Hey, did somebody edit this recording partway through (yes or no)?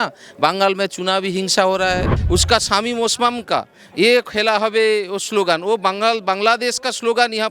yes